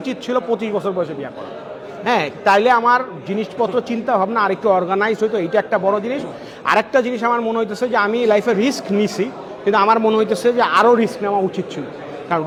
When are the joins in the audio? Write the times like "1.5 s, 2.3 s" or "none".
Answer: none